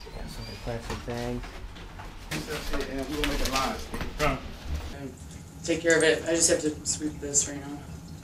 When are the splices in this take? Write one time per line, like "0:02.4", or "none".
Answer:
0:04.8